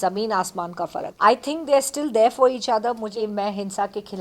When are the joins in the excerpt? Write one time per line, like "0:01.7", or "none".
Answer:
0:01.0
0:03.1